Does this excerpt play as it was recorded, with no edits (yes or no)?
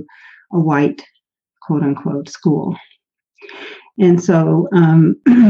yes